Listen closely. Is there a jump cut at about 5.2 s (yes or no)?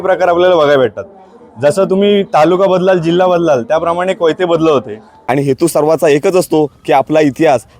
yes